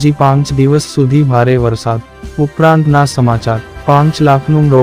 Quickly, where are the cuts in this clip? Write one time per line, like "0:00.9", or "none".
0:02.3
0:03.8